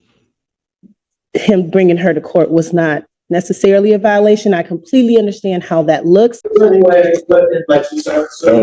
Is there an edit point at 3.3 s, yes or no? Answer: no